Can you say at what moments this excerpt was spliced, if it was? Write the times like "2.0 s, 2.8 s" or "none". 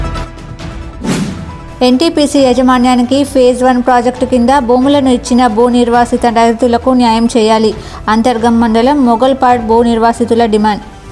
none